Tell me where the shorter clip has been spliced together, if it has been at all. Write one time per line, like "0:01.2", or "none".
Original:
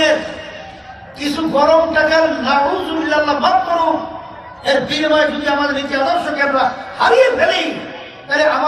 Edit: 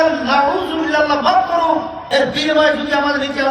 0:02.0

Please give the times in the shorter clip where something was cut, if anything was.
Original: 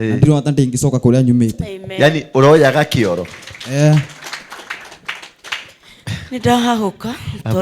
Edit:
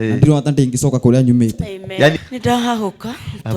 0:02.2

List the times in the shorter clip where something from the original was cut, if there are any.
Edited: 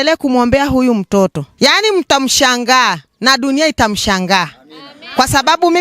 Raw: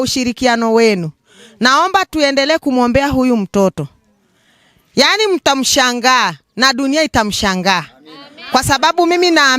0:01.4

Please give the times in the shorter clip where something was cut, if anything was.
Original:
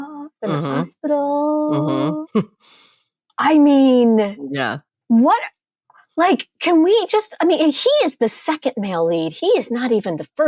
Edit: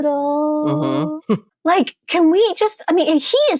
0:01.5

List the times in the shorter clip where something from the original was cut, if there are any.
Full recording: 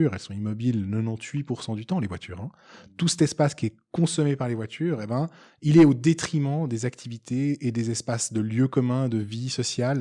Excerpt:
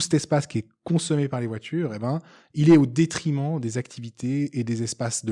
none

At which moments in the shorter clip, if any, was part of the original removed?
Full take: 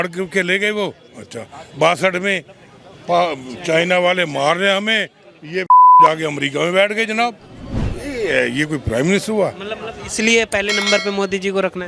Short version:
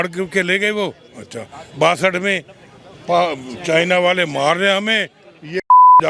none

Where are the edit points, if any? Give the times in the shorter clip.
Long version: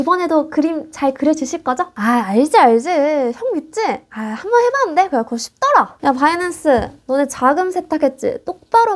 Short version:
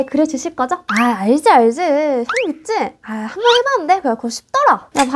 none

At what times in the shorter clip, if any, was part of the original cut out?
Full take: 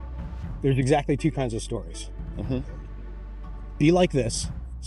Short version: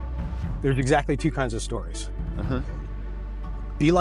none

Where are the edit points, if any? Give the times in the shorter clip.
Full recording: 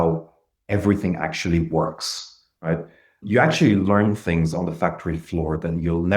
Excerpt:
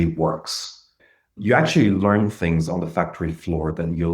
0:01.0

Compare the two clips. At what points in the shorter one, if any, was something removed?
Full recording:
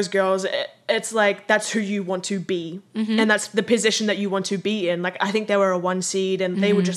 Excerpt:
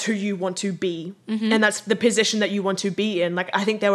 none

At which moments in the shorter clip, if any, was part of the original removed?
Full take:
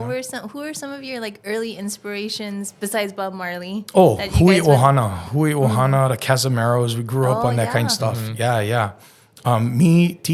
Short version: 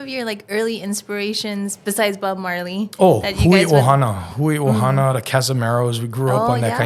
none

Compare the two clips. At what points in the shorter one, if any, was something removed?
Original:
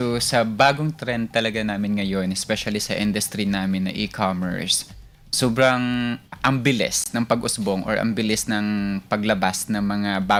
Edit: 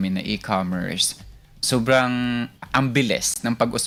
none

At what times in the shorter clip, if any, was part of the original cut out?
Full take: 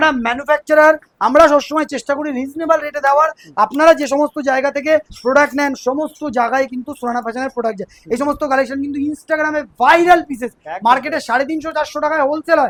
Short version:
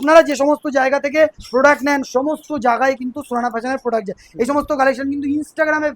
none

